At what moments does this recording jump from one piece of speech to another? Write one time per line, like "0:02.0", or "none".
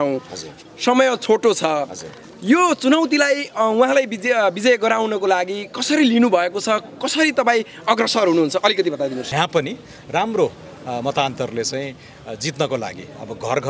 0:09.3